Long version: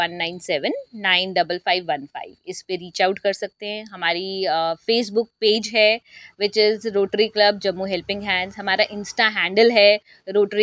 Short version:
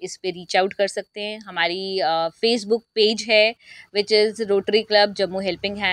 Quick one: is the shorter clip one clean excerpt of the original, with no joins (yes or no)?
yes